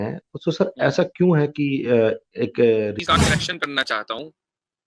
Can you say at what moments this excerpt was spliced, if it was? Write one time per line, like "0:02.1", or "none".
0:03.0